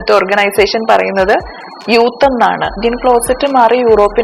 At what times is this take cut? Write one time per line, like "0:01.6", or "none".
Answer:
0:02.7